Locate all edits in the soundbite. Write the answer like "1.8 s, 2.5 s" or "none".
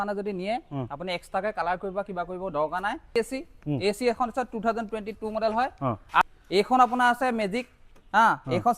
3.1 s, 6.2 s